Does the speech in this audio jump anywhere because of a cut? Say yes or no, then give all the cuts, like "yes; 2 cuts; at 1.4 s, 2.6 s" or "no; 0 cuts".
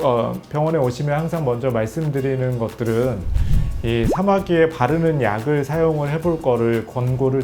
no; 0 cuts